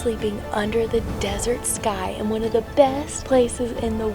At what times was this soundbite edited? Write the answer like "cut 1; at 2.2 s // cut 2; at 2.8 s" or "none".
cut 1; at 2.8 s